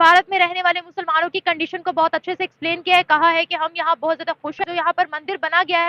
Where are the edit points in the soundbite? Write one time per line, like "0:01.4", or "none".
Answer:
0:04.7